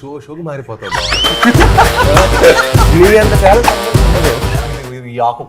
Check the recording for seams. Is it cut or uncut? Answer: cut